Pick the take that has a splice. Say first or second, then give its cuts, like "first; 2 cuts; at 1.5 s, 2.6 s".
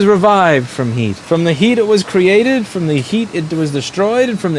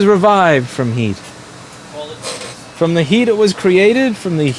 first; 1 cut; at 1.2 s